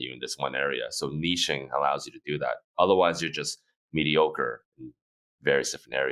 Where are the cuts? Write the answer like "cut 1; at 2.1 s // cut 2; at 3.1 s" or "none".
none